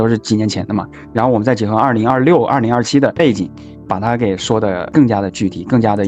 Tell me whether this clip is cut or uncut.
cut